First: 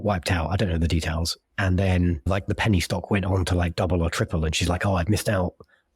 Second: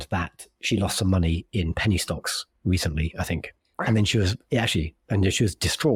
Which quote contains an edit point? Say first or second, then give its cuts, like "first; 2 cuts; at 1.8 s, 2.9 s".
first; 1 cut; at 2.3 s